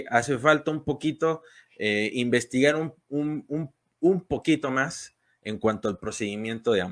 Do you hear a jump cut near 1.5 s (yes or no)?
no